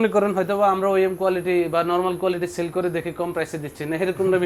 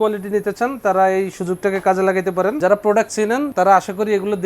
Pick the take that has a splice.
second; 2 cuts; at 2.6 s, 3.5 s

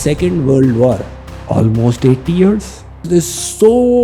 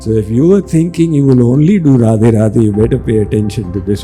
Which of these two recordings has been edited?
first; 2 cuts; at 1.1 s, 3.0 s

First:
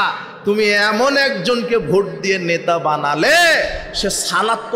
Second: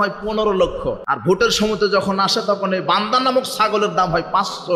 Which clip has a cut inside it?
second; 1 cut; at 1.1 s

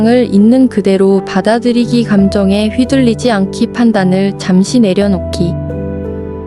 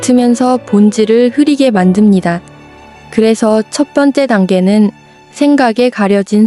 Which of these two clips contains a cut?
first; 1 cut; at 5.3 s

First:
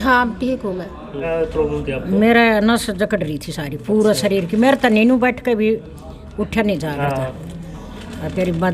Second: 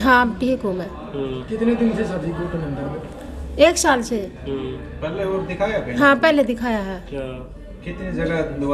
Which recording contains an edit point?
first; 1 cut; at 1.3 s

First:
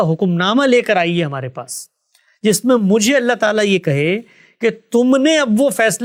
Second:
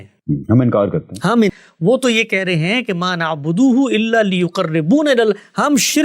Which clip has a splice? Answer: second; 1 cut; at 1.6 s

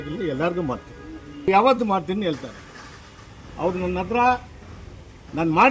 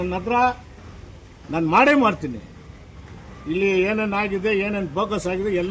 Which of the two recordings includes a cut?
first; 1 cut; at 1.5 s

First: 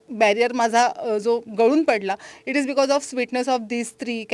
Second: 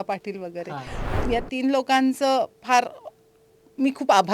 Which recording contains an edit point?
second; 1 cut; at 1.1 s

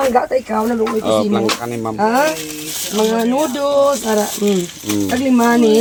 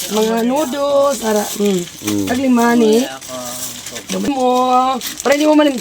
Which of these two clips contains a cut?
second; 1 cut; at 4.2 s

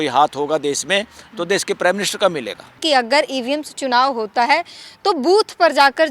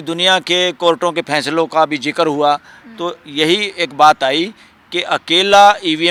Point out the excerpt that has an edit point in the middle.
first; 1 cut; at 2.8 s

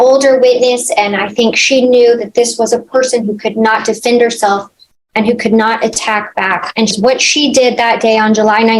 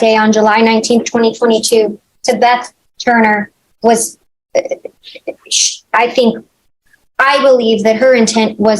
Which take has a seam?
first; 1 cut; at 6.9 s

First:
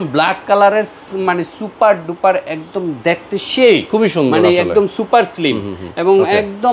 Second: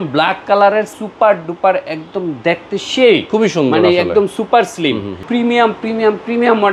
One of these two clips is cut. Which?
second; 2 cuts; at 1.0 s, 5.2 s

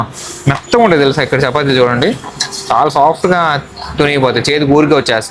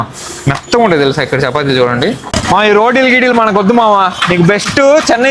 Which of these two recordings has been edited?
second; 1 cut; at 2.3 s

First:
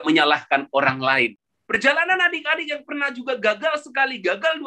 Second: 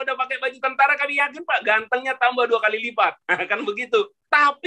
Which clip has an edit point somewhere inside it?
first; 1 cut; at 1.3 s

